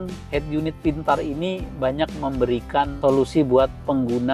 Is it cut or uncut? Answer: cut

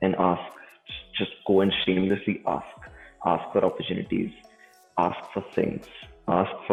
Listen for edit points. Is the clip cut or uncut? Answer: uncut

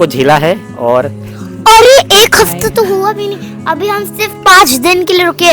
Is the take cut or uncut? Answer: uncut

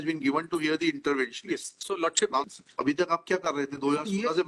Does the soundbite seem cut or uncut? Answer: cut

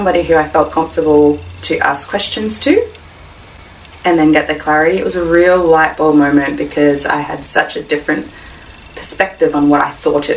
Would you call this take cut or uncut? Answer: uncut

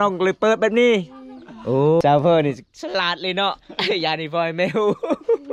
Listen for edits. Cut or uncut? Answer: cut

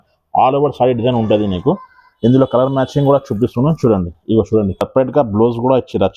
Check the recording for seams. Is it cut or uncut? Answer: cut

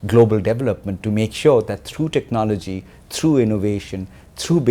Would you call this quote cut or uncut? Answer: cut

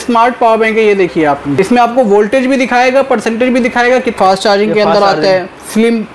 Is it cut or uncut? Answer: cut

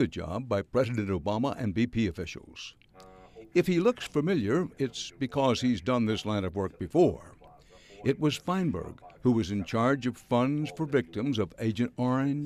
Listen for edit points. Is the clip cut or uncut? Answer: uncut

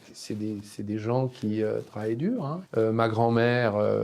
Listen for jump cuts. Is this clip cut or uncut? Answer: cut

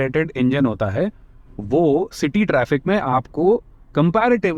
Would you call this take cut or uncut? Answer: uncut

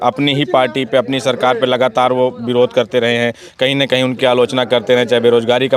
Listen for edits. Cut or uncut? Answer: uncut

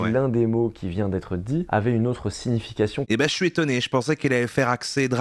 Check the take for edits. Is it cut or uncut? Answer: uncut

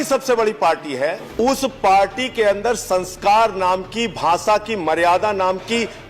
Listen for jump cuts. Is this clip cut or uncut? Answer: cut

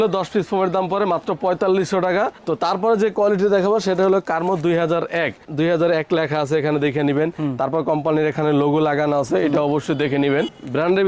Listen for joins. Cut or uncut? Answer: uncut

